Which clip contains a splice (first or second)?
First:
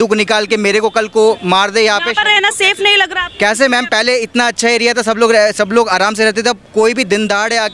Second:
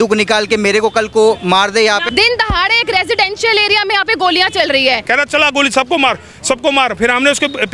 second